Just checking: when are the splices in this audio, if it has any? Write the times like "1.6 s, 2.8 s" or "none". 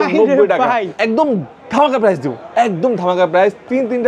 0.9 s